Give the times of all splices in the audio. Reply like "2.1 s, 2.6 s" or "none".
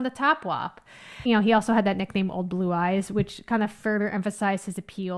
1.2 s